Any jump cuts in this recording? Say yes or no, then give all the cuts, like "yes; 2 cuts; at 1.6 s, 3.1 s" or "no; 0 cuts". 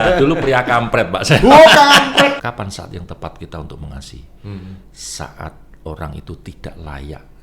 yes; 1 cut; at 2.4 s